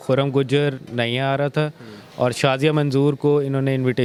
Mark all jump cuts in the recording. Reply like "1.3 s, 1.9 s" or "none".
none